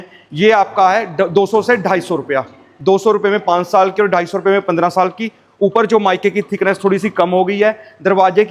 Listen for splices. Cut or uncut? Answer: uncut